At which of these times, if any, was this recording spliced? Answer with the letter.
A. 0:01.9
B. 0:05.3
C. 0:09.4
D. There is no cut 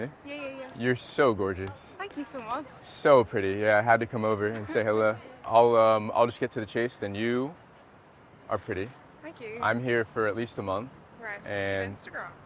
B